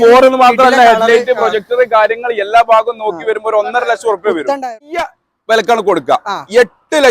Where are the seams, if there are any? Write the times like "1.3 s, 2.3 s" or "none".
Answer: 5.2 s

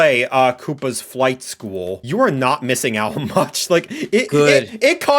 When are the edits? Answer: 2.0 s

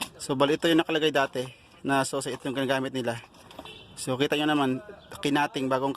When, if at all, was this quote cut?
none

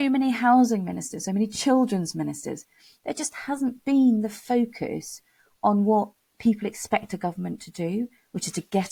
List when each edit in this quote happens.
none

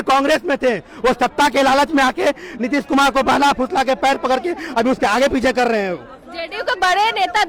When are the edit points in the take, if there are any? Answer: none

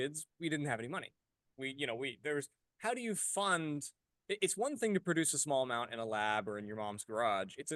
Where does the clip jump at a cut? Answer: none

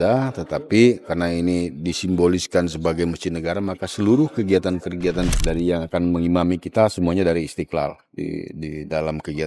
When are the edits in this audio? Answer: 5.3 s

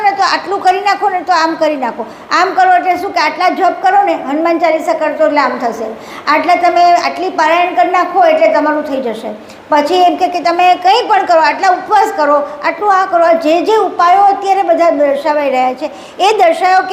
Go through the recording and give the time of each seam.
none

